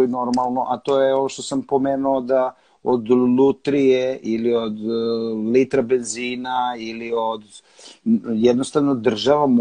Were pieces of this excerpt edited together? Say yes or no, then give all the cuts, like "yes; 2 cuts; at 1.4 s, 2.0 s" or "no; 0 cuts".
no; 0 cuts